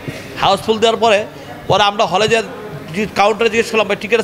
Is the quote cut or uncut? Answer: uncut